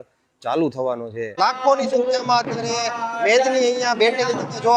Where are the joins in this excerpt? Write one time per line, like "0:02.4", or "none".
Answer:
0:01.4